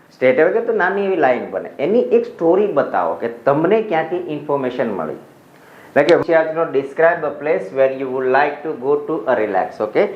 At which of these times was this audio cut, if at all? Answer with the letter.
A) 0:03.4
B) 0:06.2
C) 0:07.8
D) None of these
B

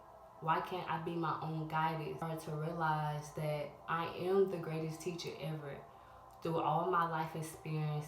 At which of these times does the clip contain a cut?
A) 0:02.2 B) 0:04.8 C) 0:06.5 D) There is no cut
A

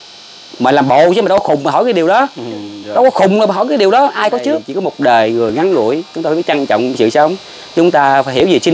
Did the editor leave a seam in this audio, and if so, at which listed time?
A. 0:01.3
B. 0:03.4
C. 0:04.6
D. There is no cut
C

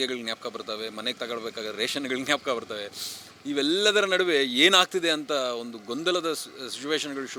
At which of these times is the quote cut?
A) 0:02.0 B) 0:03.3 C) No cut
C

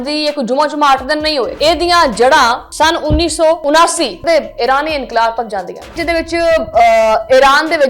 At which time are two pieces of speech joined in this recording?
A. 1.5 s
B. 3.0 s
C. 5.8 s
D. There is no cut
A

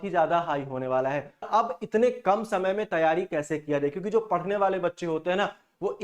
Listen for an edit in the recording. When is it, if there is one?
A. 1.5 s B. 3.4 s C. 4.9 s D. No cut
A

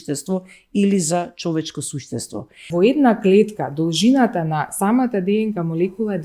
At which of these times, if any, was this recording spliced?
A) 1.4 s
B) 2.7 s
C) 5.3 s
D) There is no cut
B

